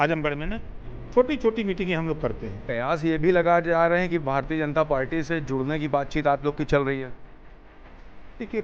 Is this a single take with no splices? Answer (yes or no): no